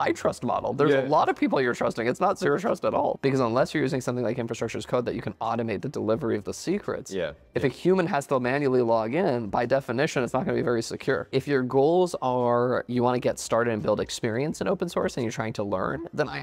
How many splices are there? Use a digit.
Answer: 3